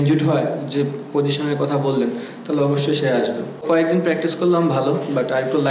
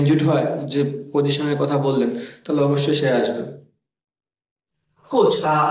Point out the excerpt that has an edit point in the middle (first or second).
first